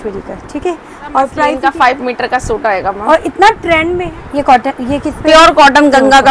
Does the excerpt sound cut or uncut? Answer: cut